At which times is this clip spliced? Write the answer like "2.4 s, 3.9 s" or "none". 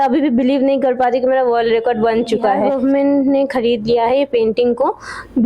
2.7 s